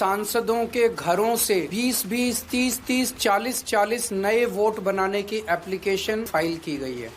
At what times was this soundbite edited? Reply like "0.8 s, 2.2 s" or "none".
1.7 s, 6.3 s